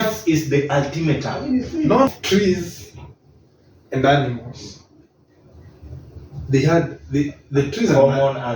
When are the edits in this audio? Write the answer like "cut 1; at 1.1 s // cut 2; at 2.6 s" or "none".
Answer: cut 1; at 2.1 s

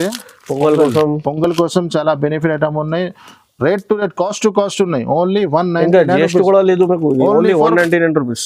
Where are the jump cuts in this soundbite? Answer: none

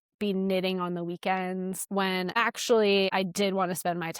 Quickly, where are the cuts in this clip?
cut 1; at 2.0 s // cut 2; at 3.1 s

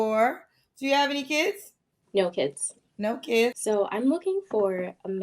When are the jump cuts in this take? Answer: cut 1; at 3.6 s

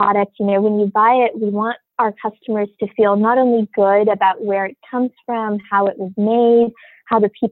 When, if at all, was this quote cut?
cut 1; at 1.8 s

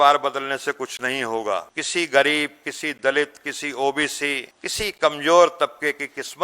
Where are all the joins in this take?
cut 1; at 1.8 s // cut 2; at 4.6 s

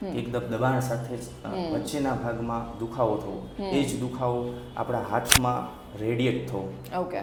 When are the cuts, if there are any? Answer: none

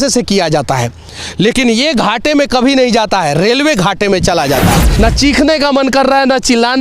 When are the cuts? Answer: cut 1; at 4.9 s

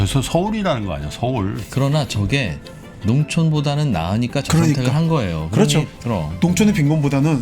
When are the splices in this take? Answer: cut 1; at 1.6 s // cut 2; at 5.9 s

